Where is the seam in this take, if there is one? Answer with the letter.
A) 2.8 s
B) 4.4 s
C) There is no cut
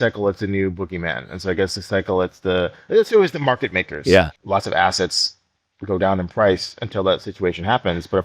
B